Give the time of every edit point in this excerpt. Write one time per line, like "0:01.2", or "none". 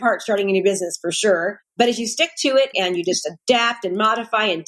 0:02.7